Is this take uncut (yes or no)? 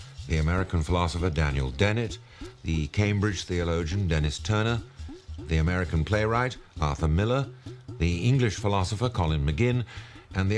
no